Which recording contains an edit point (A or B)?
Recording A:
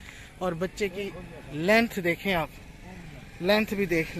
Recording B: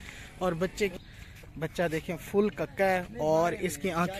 B